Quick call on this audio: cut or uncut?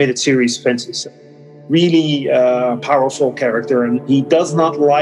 cut